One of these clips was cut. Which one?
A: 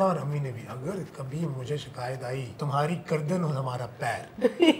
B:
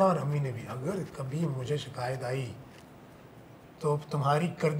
A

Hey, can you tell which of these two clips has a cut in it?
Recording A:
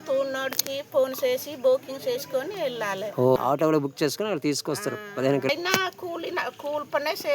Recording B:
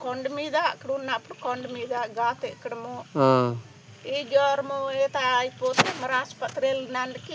A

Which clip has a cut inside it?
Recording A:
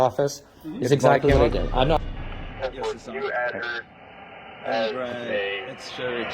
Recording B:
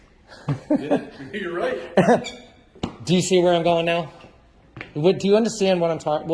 A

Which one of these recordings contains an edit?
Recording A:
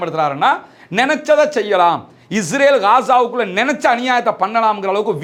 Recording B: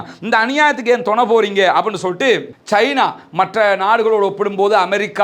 B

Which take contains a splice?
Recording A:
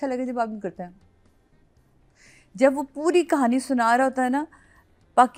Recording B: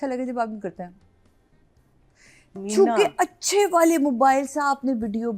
B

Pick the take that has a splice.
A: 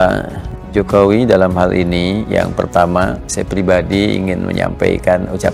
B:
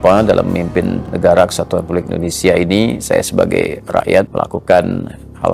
B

